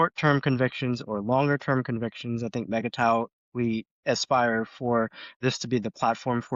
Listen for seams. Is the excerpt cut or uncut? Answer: uncut